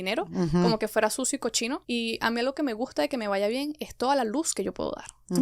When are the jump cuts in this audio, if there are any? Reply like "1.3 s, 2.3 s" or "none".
1.8 s